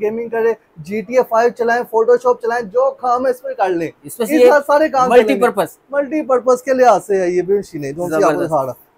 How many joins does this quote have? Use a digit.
0